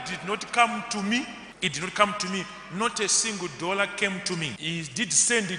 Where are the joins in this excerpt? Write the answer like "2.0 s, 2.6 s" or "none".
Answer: 1.4 s, 4.6 s